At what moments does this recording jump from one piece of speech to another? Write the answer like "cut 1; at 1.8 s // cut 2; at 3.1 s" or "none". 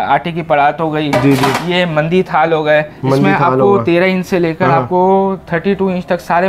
none